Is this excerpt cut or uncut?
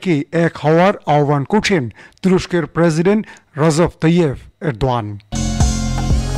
cut